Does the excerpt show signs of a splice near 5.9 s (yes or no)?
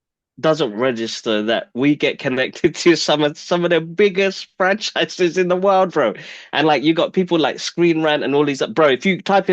no